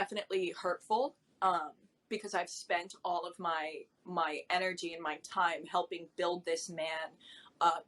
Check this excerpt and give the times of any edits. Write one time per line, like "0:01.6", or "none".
none